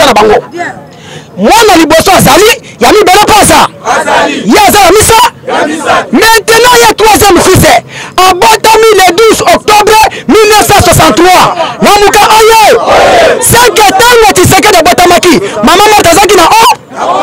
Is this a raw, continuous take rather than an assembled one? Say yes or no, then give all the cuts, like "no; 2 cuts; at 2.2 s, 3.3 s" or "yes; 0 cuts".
yes; 0 cuts